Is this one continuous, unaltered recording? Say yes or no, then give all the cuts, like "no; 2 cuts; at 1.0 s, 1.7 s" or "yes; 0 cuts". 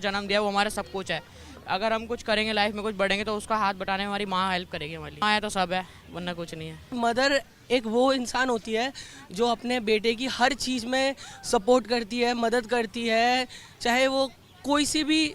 no; 2 cuts; at 5.2 s, 6.9 s